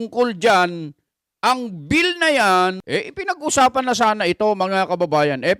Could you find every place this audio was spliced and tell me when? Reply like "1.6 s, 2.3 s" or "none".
2.8 s